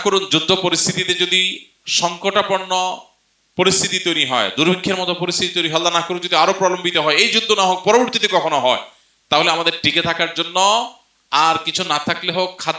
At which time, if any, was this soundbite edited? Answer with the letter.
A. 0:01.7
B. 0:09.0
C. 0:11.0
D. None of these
D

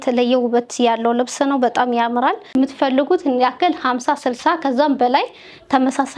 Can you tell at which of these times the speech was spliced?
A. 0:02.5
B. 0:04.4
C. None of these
A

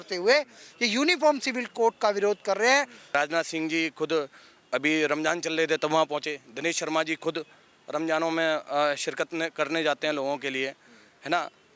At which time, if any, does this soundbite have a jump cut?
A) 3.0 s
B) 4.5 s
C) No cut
A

